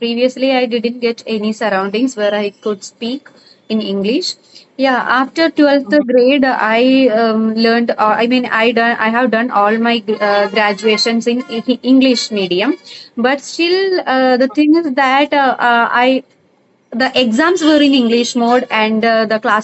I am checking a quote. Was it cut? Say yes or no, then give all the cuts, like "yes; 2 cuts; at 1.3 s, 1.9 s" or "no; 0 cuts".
no; 0 cuts